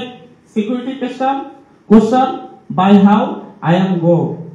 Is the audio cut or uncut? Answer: uncut